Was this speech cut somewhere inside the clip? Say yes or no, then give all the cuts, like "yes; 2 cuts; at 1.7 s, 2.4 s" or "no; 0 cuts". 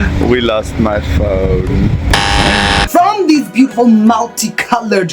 yes; 1 cut; at 2.9 s